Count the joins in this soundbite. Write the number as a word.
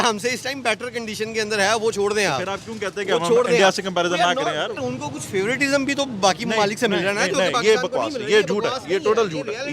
one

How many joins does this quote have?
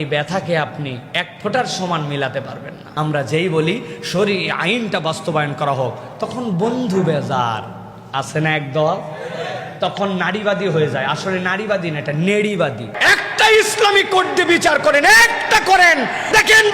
two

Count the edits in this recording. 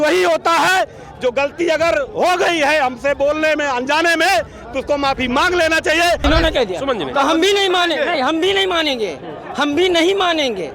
one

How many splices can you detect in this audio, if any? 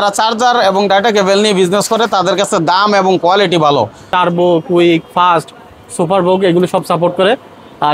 one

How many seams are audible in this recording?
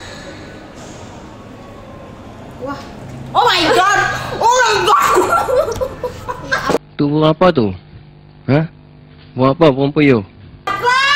zero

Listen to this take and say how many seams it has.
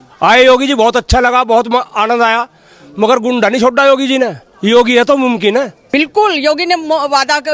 one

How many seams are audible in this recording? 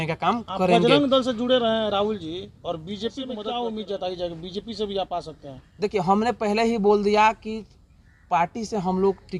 one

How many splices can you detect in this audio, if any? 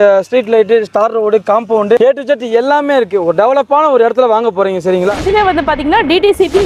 one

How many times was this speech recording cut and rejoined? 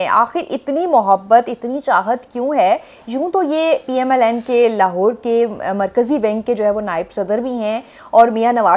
zero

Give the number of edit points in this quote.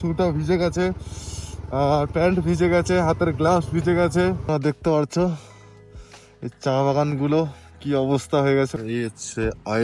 two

